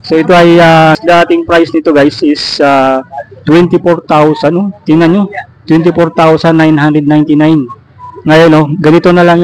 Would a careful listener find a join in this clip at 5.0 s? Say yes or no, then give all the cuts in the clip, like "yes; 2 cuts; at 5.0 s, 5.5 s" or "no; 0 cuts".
no; 1 cut; at 1.0 s